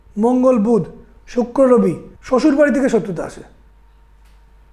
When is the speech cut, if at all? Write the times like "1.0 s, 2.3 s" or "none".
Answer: 2.1 s